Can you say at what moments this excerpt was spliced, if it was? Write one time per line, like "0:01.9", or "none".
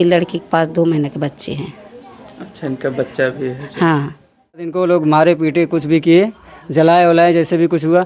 0:04.7